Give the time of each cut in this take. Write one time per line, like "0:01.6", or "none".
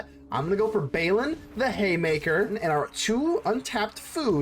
0:02.5